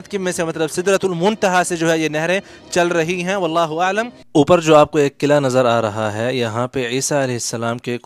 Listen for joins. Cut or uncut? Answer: cut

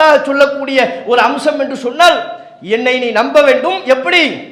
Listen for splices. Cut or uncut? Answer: uncut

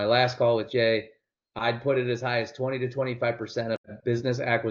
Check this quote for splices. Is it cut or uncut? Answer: uncut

